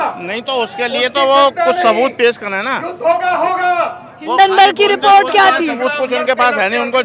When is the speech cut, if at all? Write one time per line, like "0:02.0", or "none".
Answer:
none